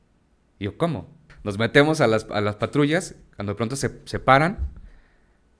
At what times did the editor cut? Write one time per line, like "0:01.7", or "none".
0:01.3